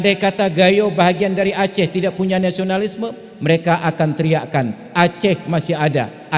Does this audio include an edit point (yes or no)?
no